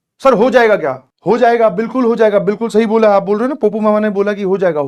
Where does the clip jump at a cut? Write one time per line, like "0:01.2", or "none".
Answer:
0:01.1